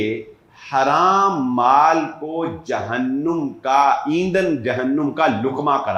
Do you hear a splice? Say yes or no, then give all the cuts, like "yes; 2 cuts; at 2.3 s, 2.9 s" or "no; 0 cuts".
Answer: no; 0 cuts